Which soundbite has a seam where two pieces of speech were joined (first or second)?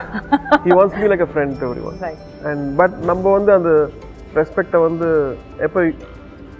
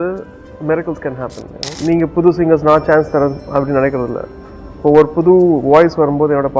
second